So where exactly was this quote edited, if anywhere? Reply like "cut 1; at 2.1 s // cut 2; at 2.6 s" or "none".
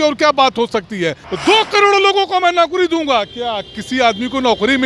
cut 1; at 1.3 s